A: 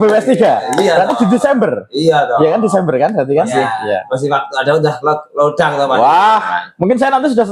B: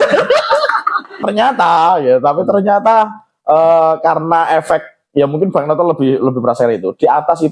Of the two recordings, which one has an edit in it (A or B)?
B